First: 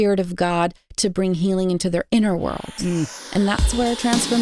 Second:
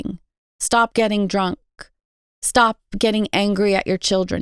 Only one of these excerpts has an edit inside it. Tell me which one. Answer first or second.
second